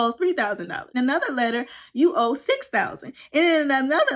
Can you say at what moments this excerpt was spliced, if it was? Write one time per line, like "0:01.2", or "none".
0:01.0